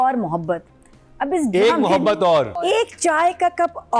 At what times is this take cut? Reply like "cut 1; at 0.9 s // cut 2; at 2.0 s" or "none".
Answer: cut 1; at 2.5 s